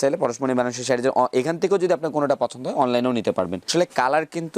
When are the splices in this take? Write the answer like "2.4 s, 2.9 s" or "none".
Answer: 3.6 s